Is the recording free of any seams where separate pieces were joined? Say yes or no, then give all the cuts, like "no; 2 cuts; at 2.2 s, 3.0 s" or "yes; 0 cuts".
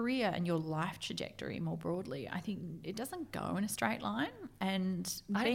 yes; 0 cuts